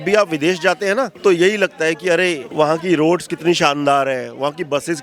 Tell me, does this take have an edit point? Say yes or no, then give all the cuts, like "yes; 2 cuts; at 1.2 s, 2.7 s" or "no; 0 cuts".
no; 0 cuts